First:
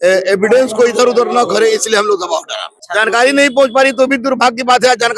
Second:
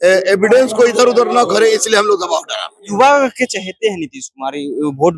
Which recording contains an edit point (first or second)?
first